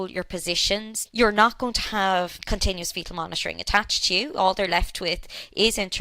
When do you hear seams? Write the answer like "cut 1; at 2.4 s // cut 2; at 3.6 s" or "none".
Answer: cut 1; at 1.0 s // cut 2; at 2.4 s